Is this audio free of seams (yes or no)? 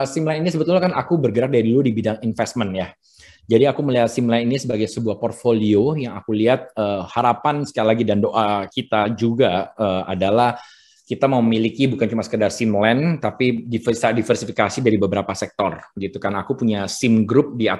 yes